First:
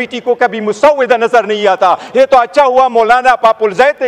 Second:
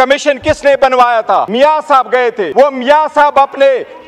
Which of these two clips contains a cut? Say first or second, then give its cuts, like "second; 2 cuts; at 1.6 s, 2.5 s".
second; 2 cuts; at 1.5 s, 2.4 s